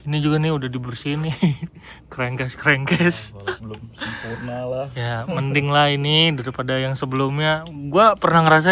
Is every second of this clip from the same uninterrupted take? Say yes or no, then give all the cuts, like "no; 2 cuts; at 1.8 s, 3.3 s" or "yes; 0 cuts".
yes; 0 cuts